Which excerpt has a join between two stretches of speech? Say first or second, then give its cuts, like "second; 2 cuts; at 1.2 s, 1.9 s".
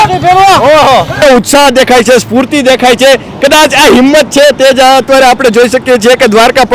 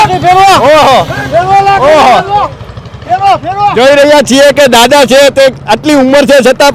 first; 1 cut; at 1.2 s